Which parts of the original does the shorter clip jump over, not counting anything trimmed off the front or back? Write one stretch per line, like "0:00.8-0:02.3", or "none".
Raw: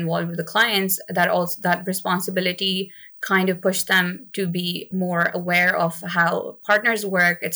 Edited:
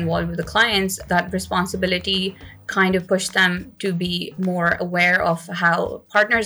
0:01.0-0:01.5